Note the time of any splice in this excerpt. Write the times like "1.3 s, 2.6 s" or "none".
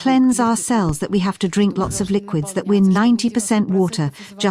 none